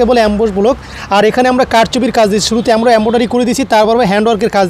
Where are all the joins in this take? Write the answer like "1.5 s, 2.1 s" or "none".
none